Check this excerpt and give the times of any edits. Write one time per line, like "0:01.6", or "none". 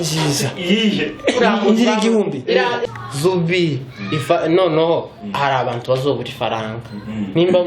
0:02.8

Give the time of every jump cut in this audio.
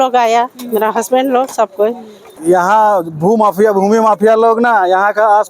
0:02.3

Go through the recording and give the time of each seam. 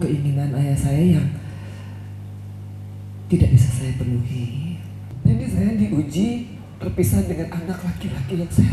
0:05.1

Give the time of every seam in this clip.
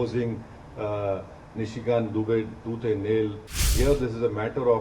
0:03.7

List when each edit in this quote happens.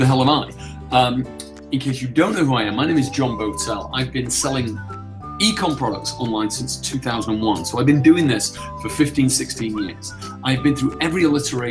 none

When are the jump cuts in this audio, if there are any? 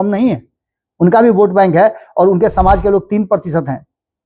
none

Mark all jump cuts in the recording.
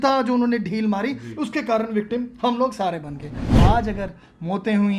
0:03.6

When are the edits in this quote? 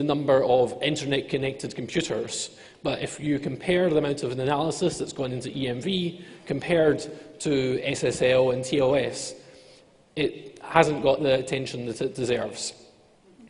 0:08.5

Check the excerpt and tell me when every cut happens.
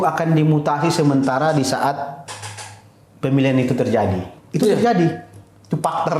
0:04.4

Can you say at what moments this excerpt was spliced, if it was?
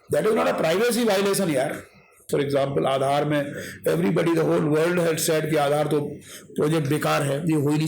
0:02.1

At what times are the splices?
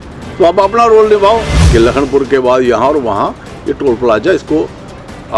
0:01.5

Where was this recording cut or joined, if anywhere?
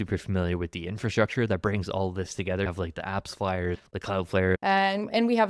0:02.7
0:04.2

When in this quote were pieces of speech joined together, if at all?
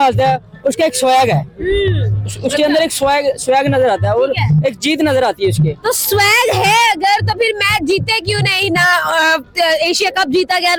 none

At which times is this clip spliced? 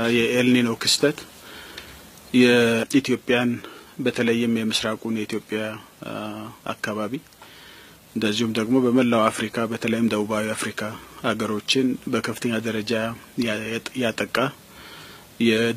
none

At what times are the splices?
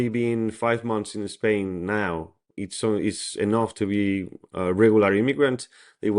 0:02.5

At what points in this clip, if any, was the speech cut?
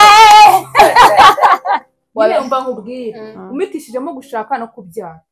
0:02.0

